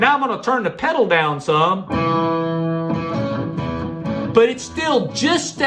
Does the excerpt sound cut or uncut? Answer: uncut